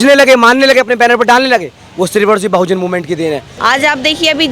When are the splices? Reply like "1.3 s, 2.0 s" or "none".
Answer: 3.5 s

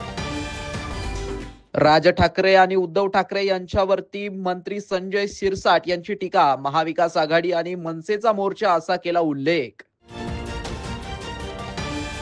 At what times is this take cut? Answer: 1.1 s

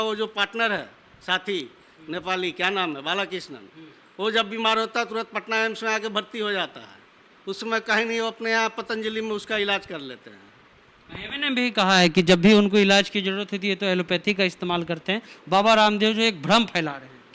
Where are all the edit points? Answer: none

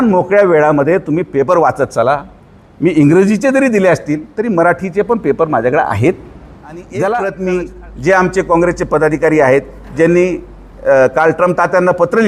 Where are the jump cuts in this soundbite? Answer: 6.9 s

